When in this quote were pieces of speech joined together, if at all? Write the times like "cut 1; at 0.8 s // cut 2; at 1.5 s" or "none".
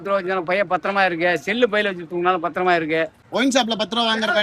cut 1; at 3.2 s